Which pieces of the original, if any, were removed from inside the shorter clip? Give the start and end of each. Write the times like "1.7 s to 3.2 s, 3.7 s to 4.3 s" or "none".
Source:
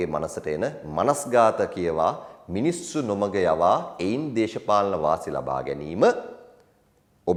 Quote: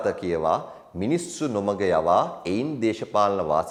none